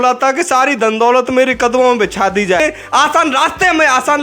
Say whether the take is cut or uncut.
cut